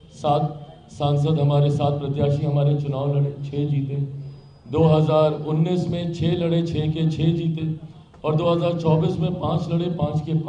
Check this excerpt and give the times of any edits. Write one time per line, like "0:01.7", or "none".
none